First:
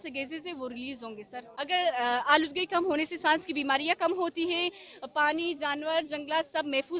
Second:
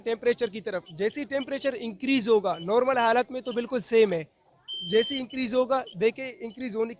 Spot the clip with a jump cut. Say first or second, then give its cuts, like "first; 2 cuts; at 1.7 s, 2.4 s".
first; 1 cut; at 1.4 s